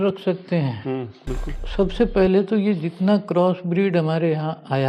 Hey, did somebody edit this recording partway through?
yes; 1 cut; at 1.6 s

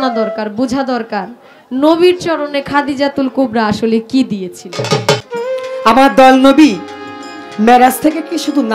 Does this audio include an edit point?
yes; 1 cut; at 5.2 s

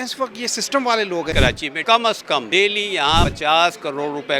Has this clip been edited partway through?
yes; 1 cut; at 1.4 s

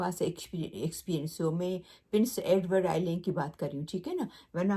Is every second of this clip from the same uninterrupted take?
yes; 0 cuts

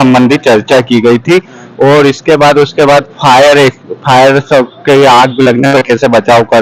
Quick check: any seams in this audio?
no; 0 cuts

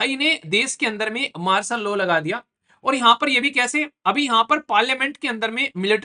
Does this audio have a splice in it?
no; 0 cuts

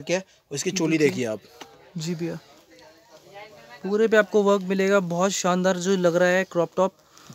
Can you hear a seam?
no; 0 cuts

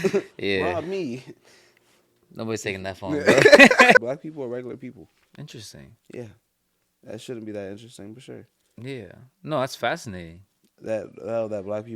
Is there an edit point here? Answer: yes; 1 cut; at 4.0 s

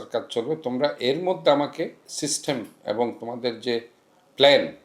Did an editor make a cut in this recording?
yes; 1 cut; at 2.0 s

